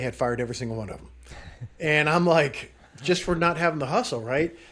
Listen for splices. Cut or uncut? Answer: uncut